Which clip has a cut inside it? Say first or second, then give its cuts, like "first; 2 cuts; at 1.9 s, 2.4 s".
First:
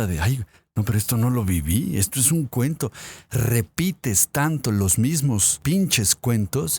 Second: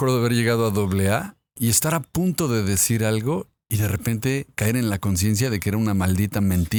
first; 1 cut; at 5.5 s